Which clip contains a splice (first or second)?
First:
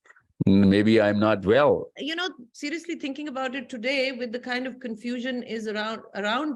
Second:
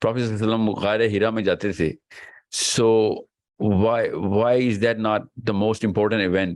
first